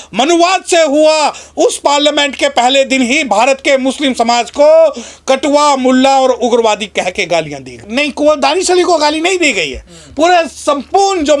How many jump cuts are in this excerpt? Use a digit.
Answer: 1